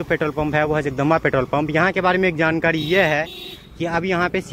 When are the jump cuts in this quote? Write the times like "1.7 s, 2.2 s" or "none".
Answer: none